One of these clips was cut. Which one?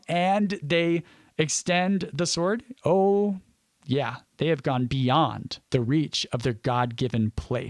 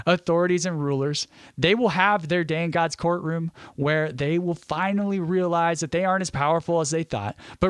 first; 1 cut; at 5.5 s

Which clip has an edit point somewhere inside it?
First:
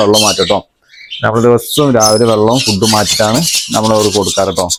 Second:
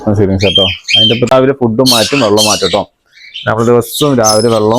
second; 1 cut; at 1.3 s

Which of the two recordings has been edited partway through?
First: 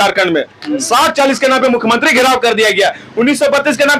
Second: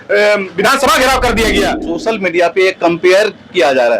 second; 1 cut; at 1.9 s

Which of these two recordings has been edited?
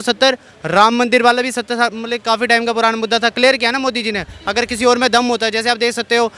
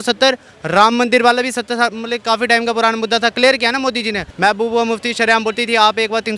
second; 1 cut; at 4.3 s

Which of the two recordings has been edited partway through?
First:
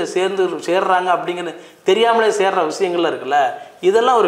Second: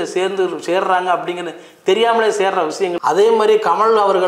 second; 1 cut; at 2.9 s

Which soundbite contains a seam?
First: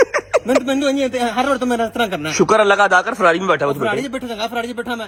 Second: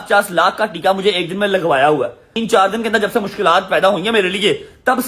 second; 1 cut; at 2.4 s

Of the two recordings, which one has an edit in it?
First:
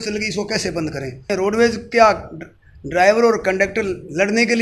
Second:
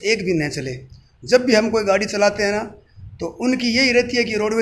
first; 1 cut; at 1.3 s

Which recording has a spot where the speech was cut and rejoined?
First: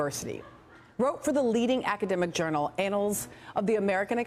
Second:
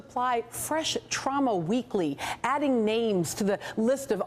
first; 1 cut; at 2.9 s

